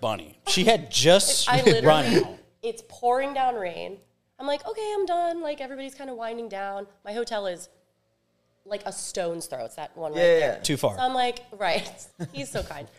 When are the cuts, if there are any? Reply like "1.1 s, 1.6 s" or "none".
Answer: none